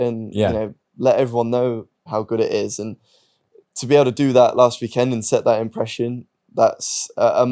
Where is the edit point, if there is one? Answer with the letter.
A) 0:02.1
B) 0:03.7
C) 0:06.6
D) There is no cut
A